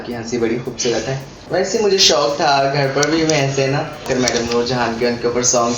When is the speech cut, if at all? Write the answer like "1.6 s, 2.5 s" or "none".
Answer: 1.3 s, 4.1 s